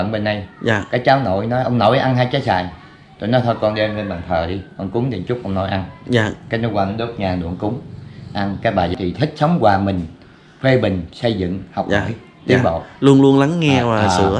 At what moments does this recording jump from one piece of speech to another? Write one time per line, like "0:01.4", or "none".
0:08.9